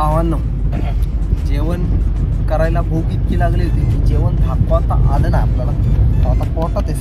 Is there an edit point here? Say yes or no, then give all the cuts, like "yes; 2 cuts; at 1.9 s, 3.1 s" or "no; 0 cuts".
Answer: no; 0 cuts